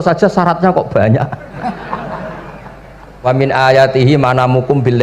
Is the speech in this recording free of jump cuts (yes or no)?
no